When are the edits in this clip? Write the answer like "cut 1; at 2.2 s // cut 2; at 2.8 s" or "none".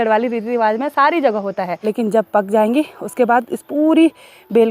cut 1; at 1.7 s